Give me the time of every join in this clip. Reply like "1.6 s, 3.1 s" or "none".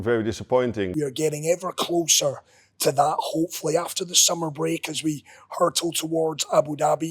0.9 s